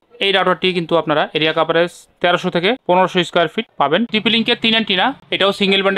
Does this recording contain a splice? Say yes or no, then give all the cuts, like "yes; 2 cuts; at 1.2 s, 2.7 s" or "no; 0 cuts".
yes; 1 cut; at 4.1 s